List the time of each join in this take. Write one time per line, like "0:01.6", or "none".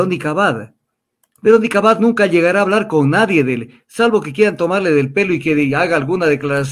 none